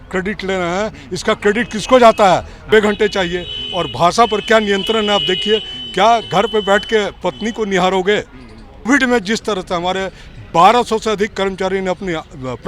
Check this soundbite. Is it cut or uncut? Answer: cut